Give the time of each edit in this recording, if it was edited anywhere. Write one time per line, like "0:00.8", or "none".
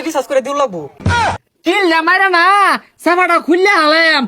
0:01.2